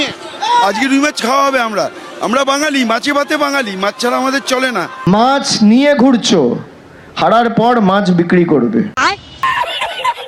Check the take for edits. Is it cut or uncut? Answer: uncut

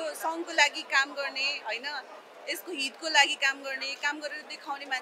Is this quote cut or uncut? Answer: uncut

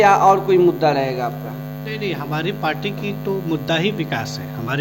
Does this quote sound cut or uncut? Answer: uncut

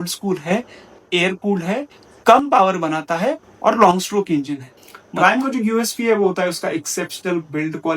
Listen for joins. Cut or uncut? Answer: cut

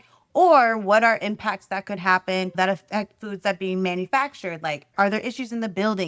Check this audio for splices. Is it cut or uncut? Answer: cut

